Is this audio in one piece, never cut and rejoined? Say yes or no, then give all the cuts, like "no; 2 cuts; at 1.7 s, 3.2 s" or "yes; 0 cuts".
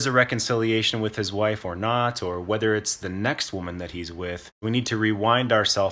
no; 1 cut; at 4.6 s